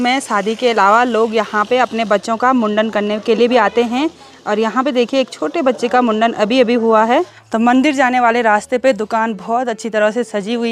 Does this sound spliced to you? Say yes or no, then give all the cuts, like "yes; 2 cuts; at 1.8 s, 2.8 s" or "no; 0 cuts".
no; 0 cuts